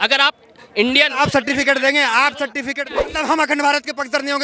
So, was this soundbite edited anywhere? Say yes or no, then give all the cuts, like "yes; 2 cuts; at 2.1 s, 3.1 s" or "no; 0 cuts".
yes; 1 cut; at 3.1 s